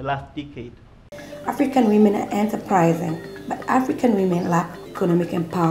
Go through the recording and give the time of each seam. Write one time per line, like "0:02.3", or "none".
0:01.0
0:04.8